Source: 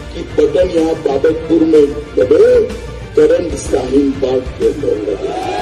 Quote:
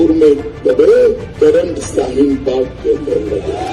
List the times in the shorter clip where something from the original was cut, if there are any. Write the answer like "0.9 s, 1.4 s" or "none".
1.3 s